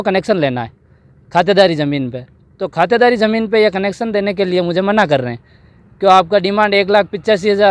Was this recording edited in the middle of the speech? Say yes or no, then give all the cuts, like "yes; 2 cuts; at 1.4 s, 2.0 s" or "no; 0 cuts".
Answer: no; 0 cuts